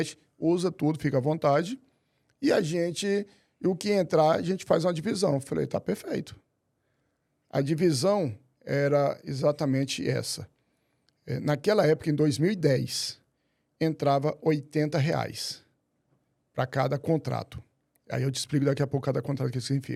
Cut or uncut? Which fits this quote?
uncut